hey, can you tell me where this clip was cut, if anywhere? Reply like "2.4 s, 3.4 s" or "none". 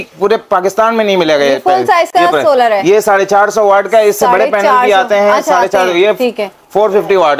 none